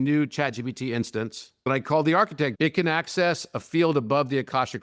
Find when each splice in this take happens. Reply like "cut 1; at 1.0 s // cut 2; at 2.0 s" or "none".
cut 1; at 1.5 s // cut 2; at 2.5 s